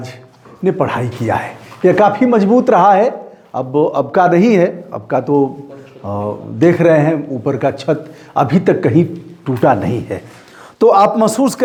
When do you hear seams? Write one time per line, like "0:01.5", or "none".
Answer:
none